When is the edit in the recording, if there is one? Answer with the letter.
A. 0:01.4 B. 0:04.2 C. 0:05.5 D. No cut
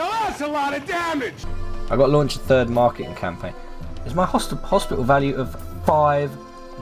A